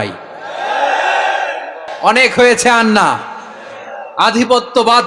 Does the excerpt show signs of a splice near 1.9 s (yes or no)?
yes